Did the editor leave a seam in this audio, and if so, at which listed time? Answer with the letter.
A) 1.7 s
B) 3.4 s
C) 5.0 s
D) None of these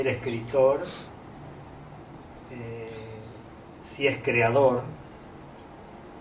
B